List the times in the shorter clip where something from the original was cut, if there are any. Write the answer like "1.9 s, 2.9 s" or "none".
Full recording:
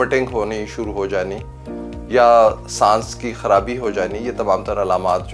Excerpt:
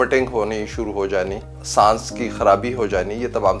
1.6 s